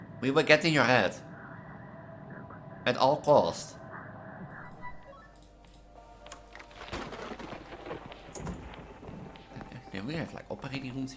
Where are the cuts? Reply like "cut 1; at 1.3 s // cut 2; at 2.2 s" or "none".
cut 1; at 5.0 s